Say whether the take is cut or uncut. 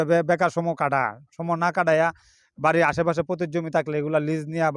uncut